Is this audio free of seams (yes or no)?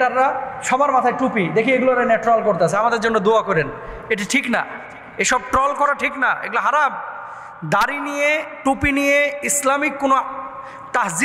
yes